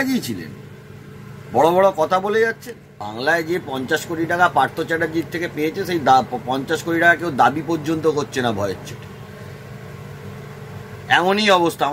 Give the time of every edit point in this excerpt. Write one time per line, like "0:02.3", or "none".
0:03.0